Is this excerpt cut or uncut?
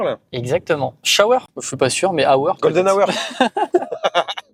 uncut